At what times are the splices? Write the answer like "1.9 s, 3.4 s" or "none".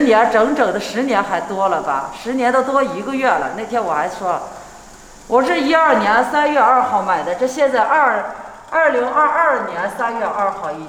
none